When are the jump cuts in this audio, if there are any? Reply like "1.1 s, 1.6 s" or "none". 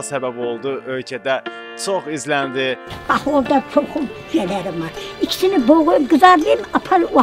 2.9 s